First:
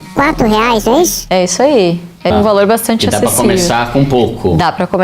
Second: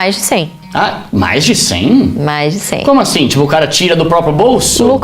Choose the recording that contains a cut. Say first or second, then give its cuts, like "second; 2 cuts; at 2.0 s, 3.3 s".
first; 1 cut; at 2.3 s